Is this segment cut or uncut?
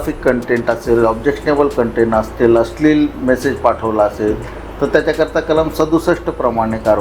uncut